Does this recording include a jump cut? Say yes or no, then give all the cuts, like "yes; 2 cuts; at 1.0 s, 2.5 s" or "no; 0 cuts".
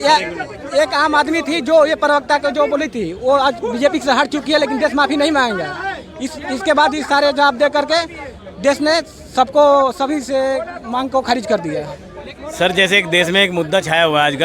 no; 0 cuts